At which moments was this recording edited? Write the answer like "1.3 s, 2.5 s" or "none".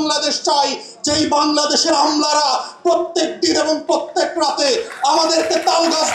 none